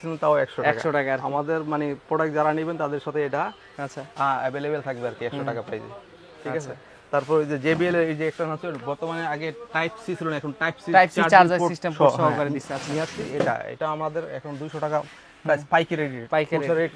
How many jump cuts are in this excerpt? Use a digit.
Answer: 0